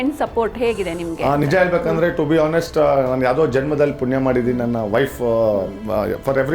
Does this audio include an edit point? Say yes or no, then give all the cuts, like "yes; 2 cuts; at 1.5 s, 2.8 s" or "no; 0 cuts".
no; 0 cuts